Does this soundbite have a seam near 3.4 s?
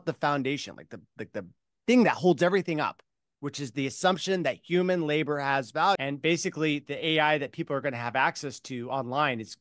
no; 1 cut; at 6.0 s

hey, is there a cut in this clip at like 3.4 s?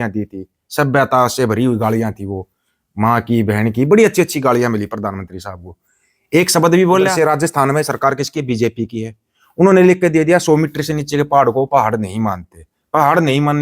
no; 1 cut; at 7.1 s

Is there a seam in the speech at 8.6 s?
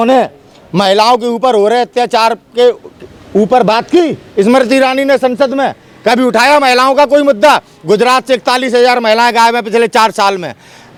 no; 0 cuts

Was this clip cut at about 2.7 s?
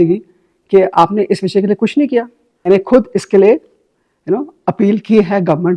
yes; 1 cut; at 2.7 s

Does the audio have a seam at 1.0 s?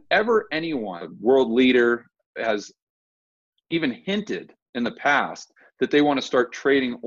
yes; 1 cut; at 1.0 s

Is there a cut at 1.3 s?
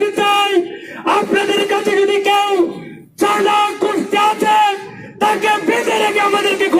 no; 0 cuts

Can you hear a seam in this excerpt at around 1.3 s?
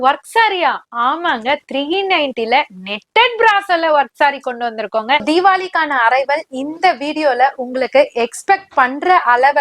no; 1 cut; at 5.2 s

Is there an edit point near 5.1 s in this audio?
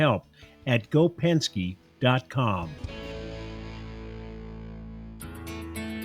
yes; 1 cut; at 5.1 s

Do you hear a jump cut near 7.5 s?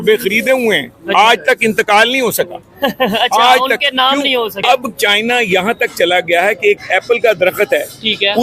no; 1 cut; at 4.5 s

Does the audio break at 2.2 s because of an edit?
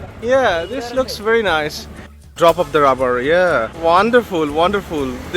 yes; 1 cut; at 2.2 s

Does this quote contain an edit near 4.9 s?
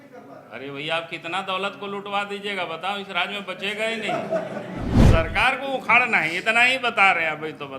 yes; 1 cut; at 4.9 s

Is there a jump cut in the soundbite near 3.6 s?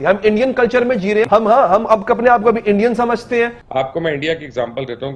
yes; 2 cuts; at 1.3 s, 3.6 s

